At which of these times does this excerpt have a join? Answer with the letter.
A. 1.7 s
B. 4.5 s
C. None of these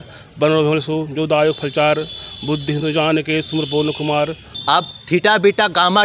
B